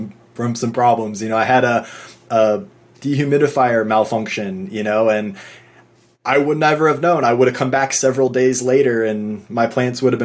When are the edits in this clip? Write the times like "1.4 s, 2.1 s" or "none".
none